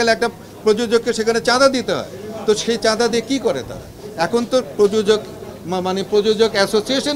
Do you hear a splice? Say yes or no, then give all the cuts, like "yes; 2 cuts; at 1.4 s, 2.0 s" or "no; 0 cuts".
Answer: no; 0 cuts